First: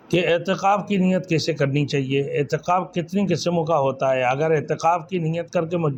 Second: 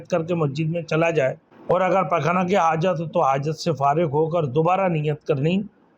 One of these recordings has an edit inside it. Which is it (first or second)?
second